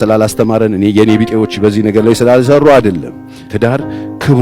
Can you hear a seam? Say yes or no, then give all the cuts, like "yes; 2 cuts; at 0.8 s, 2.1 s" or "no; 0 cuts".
no; 0 cuts